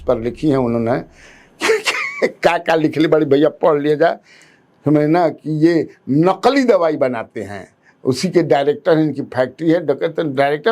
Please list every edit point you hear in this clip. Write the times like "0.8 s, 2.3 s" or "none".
none

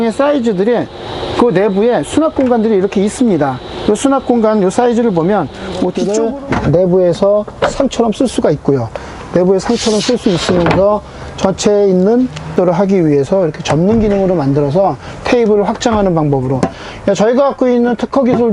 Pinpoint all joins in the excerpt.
6.0 s, 12.5 s

